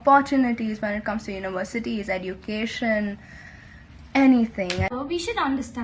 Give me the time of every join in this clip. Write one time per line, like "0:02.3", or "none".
0:04.9